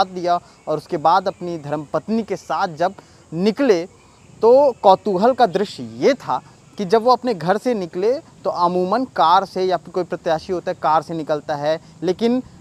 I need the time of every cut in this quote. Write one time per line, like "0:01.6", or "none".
none